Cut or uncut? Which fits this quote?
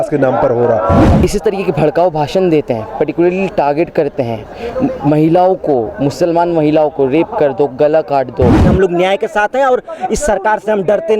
cut